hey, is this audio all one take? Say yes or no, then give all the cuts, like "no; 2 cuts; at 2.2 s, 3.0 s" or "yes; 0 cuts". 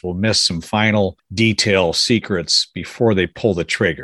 no; 1 cut; at 1.2 s